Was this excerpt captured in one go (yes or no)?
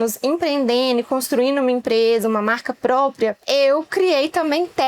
no